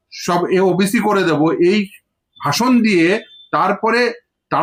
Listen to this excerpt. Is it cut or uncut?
uncut